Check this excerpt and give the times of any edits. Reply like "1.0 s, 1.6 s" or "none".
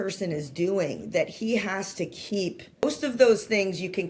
2.8 s